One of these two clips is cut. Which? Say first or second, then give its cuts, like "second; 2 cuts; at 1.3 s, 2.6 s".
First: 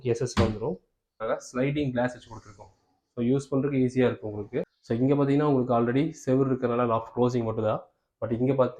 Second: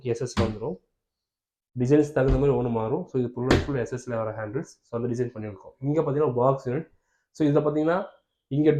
first; 2 cuts; at 1.1 s, 4.8 s